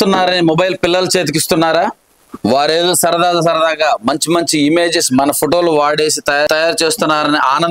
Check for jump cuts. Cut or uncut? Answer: uncut